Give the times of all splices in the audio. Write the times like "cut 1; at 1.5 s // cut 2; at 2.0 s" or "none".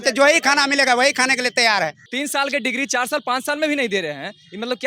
cut 1; at 2.0 s